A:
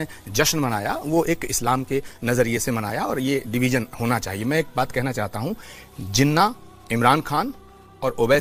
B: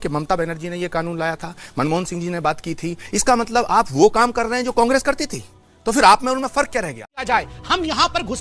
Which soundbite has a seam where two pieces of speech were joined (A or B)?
B